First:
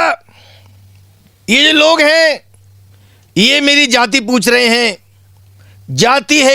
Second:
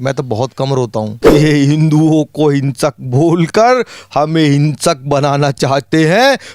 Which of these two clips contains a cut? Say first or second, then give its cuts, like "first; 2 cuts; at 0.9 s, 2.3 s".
second; 1 cut; at 1.1 s